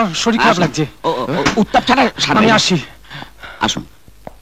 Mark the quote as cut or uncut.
uncut